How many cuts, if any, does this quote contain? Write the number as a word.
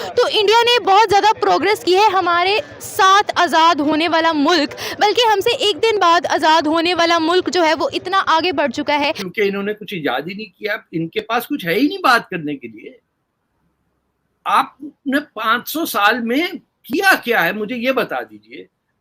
one